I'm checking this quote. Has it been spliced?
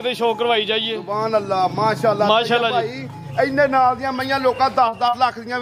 no; 0 cuts

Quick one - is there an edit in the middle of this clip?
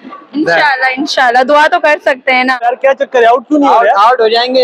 yes; 1 cut; at 2.6 s

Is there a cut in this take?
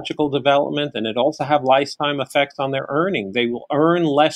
no; 0 cuts

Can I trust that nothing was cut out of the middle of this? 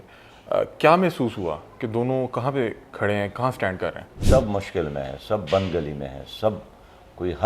no; 1 cut; at 4.2 s

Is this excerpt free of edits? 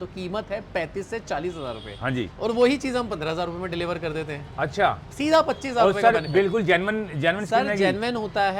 yes; 0 cuts

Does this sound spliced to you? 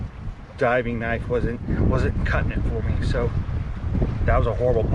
no; 0 cuts

